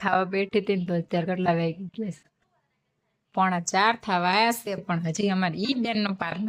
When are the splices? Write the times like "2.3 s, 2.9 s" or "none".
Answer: none